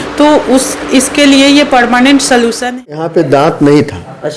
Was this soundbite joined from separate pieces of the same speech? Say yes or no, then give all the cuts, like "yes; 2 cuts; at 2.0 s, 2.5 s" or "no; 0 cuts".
yes; 1 cut; at 2.8 s